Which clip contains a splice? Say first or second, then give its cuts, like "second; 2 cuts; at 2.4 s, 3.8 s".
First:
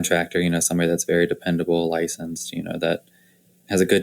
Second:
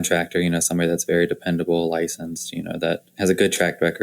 second; 1 cut; at 3.1 s